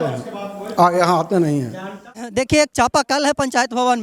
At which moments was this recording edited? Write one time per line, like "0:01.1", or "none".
0:02.0